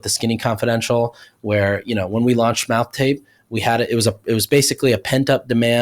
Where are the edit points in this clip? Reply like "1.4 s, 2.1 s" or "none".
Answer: none